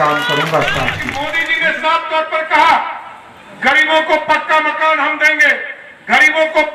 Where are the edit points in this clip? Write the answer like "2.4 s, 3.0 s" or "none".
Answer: 1.4 s